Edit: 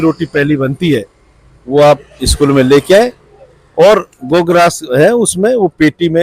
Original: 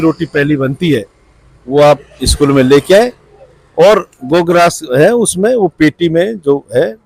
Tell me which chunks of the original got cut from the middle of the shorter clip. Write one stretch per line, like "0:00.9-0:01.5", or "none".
none